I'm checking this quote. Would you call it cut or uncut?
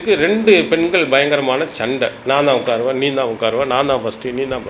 cut